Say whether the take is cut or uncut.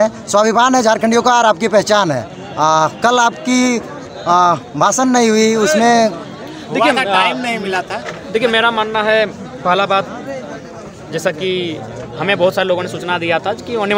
uncut